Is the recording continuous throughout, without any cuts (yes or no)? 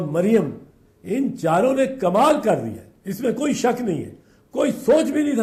yes